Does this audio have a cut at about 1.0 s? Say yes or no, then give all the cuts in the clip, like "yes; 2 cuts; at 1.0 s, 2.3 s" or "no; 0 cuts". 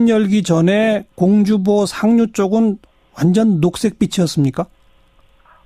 no; 1 cut; at 4.7 s